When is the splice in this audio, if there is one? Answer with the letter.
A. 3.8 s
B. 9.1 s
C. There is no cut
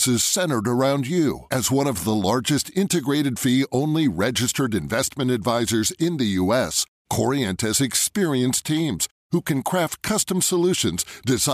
C